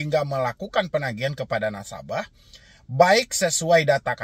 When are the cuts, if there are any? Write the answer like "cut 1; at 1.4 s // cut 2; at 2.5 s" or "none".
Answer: none